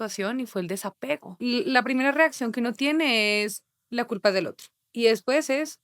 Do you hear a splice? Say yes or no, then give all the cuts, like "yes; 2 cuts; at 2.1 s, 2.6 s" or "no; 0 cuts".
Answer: yes; 2 cuts; at 1.4 s, 4.8 s